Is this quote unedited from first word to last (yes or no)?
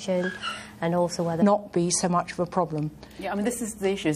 yes